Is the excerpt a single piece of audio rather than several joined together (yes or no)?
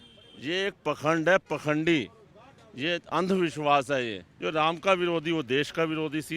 no